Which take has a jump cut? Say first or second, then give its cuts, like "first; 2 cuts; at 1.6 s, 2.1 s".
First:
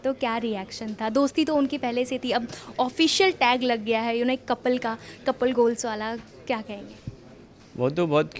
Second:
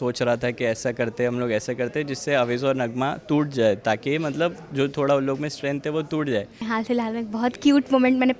second; 1 cut; at 6.6 s